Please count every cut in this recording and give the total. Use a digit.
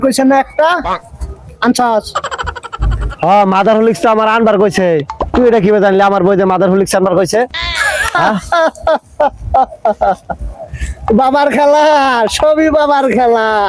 0